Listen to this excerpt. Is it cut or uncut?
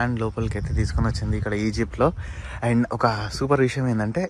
uncut